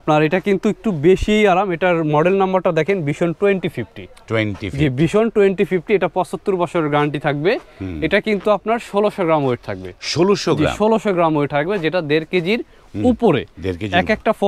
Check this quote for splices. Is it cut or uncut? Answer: uncut